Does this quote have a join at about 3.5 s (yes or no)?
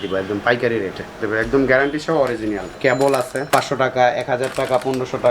yes